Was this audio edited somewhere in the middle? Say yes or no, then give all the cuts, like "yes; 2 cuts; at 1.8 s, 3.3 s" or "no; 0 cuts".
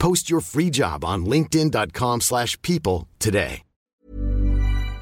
yes; 1 cut; at 3.9 s